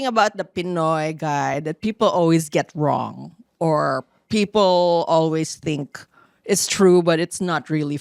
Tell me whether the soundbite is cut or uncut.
uncut